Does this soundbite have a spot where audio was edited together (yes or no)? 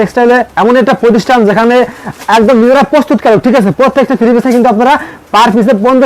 no